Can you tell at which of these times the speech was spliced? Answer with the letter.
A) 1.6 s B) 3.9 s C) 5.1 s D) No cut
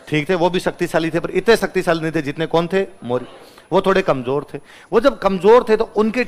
D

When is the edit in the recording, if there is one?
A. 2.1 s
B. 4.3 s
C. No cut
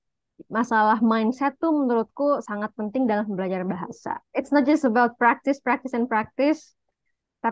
B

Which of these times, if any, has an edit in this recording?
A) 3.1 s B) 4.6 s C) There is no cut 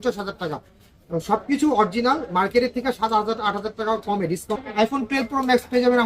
B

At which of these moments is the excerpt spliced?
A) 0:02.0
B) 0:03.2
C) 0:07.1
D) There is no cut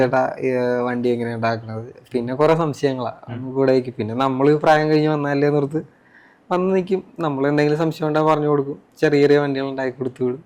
D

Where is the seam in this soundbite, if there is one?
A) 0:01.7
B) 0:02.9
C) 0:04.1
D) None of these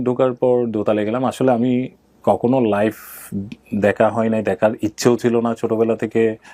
D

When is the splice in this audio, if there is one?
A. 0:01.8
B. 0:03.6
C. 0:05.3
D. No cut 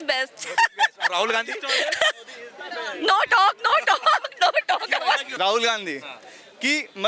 C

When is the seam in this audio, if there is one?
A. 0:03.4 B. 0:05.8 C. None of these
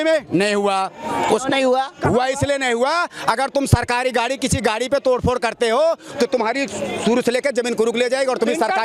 C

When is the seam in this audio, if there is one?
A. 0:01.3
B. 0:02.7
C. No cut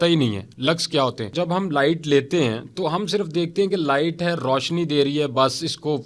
A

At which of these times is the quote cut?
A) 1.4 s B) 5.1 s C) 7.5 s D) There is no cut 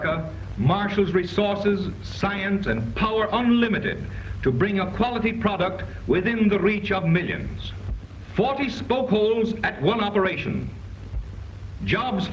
C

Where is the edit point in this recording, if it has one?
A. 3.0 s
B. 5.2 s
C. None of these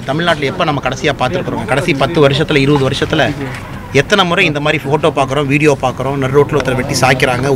C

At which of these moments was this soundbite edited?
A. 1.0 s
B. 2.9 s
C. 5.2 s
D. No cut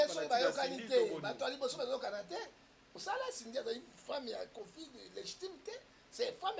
B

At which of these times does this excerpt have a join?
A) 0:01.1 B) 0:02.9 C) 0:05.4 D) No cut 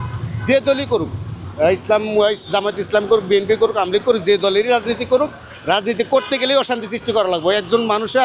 D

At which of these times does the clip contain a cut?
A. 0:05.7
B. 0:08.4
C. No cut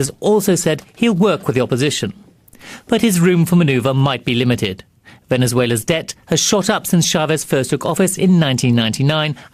A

